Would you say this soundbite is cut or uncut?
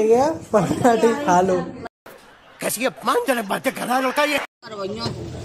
cut